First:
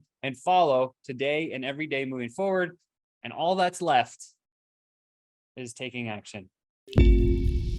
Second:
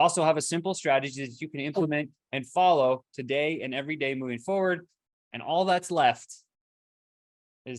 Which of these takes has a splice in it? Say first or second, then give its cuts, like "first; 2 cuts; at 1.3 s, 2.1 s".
first; 1 cut; at 6.8 s